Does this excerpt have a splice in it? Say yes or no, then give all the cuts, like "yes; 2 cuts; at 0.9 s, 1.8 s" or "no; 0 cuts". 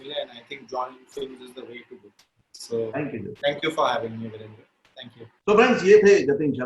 no; 0 cuts